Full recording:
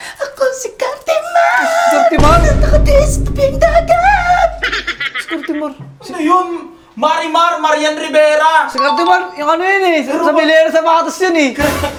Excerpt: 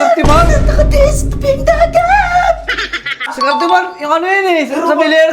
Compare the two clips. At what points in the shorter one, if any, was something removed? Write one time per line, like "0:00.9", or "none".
0:03.3